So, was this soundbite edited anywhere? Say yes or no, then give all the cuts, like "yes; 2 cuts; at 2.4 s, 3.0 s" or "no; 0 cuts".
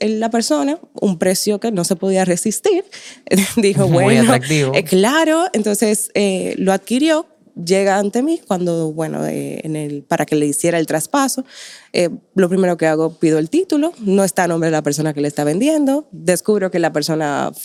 no; 0 cuts